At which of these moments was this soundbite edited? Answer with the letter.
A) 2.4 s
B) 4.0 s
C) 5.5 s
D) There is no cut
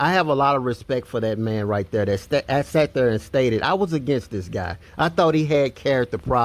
B